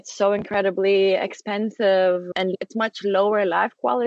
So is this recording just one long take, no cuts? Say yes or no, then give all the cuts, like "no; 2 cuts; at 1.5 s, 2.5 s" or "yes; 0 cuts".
no; 1 cut; at 2.4 s